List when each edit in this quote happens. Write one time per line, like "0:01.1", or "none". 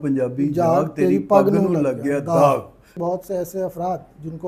0:03.0